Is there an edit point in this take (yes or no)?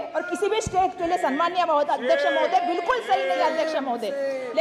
no